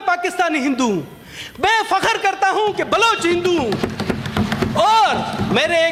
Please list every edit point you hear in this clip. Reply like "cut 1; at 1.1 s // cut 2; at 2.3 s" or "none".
none